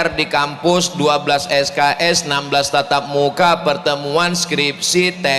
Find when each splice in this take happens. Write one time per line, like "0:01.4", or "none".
none

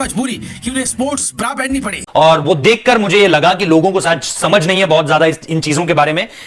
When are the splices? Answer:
0:02.0

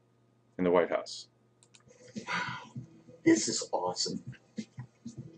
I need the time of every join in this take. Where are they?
none

